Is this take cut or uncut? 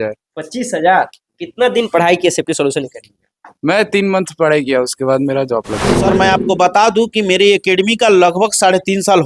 cut